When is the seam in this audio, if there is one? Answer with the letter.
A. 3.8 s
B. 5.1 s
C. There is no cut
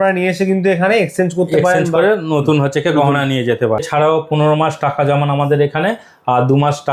A